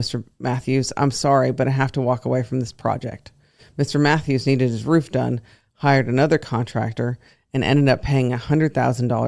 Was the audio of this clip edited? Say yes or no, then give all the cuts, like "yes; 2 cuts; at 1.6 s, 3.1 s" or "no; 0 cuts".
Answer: no; 0 cuts